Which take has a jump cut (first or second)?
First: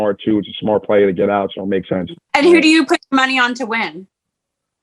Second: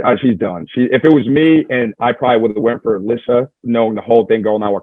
first